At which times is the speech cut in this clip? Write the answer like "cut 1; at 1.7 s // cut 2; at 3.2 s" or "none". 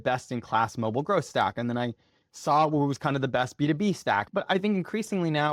cut 1; at 4.3 s